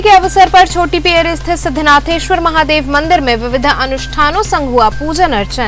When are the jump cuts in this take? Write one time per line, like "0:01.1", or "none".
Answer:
none